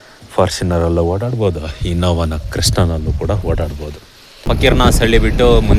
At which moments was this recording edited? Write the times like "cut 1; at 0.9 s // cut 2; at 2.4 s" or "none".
cut 1; at 4.5 s